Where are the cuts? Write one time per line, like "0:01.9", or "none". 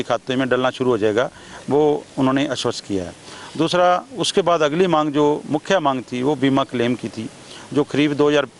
none